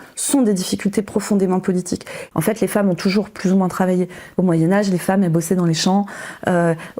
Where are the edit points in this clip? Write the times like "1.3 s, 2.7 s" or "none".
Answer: 2.1 s, 4.2 s